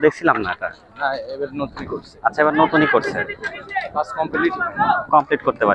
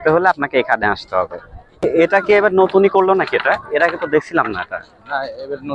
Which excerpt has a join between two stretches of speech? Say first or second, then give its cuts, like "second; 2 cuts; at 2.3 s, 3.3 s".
second; 1 cut; at 1.8 s